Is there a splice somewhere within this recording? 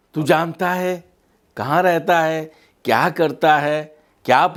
no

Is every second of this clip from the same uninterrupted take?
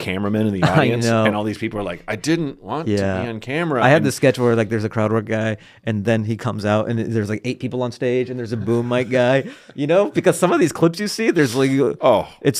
yes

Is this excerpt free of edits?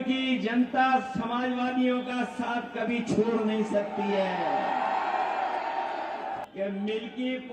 yes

